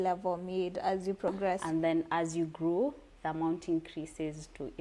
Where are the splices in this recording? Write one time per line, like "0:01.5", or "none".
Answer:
0:01.6